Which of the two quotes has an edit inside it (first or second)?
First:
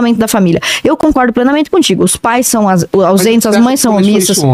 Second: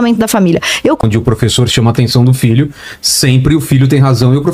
second